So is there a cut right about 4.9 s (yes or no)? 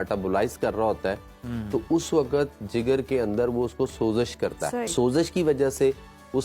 yes